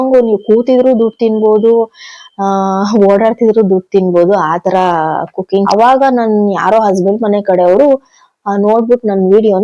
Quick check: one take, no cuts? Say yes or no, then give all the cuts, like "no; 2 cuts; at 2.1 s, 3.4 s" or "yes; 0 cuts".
no; 1 cut; at 5.7 s